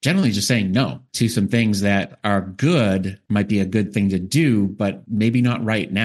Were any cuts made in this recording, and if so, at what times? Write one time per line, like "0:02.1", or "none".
0:01.0
0:03.2
0:05.0